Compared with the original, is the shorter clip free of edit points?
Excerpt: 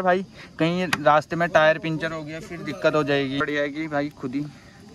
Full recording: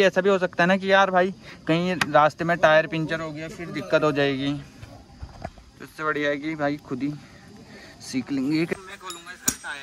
no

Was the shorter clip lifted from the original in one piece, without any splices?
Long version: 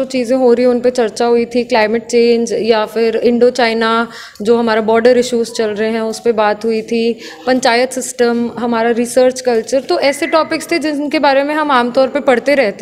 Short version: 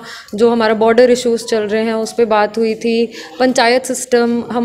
yes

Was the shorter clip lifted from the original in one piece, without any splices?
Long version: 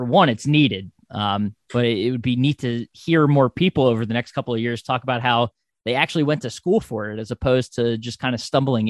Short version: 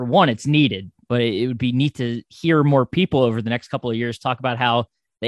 no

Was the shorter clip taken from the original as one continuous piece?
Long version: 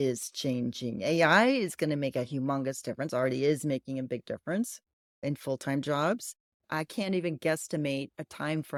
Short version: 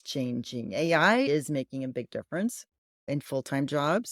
no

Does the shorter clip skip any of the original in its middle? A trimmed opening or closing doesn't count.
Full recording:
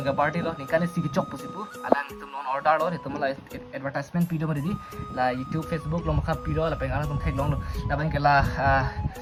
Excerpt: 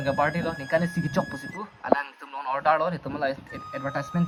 no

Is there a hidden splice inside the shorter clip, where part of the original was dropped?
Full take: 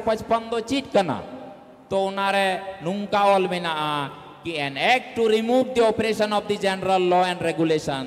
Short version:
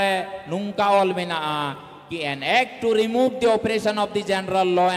no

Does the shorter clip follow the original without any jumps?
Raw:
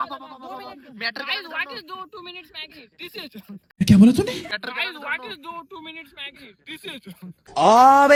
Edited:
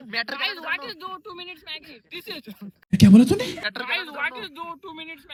yes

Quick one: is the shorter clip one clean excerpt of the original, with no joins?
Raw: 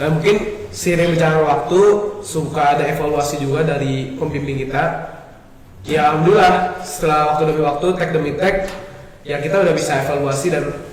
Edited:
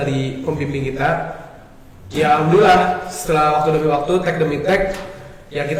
yes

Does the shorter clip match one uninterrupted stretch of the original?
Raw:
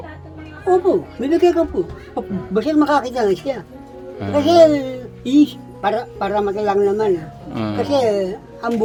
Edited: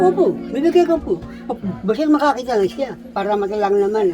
no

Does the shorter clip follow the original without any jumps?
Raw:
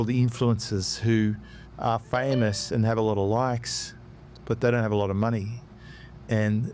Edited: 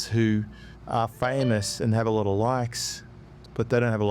yes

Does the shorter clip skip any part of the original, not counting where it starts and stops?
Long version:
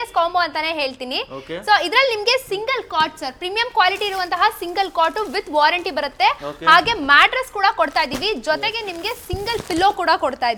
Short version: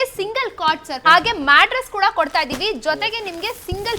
yes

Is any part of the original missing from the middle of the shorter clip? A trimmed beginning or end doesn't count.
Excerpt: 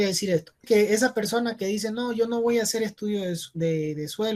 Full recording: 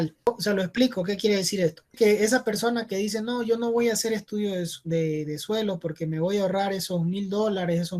no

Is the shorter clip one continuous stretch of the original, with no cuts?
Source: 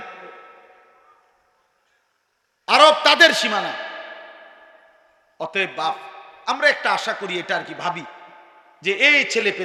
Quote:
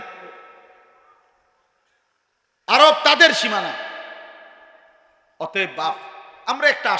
yes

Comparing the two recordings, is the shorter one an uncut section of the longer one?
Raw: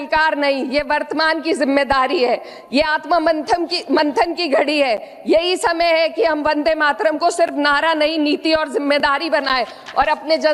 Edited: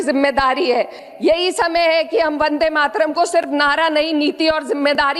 no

